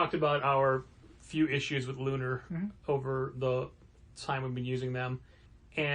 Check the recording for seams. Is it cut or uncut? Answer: uncut